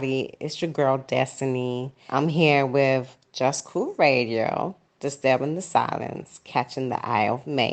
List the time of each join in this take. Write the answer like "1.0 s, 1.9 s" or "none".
1.9 s